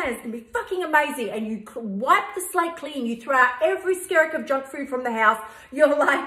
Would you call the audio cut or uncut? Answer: uncut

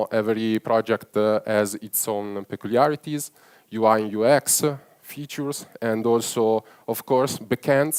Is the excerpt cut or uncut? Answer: uncut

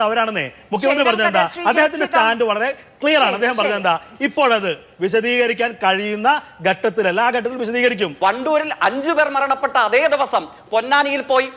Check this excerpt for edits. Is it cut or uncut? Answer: cut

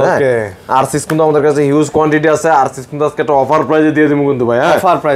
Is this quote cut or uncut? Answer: uncut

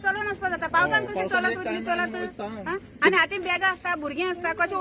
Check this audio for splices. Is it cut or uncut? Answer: uncut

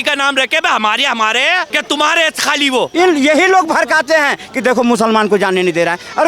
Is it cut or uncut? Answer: cut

